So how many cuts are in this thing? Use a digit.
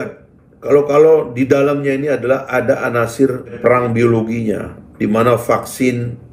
1